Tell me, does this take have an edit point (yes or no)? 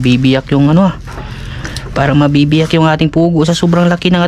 no